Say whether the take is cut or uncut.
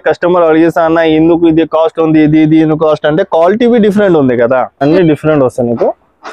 cut